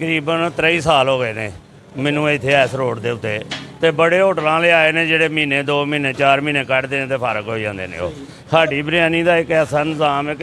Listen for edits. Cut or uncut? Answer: uncut